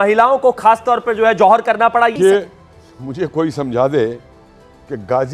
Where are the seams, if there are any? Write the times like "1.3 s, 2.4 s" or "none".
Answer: 2.1 s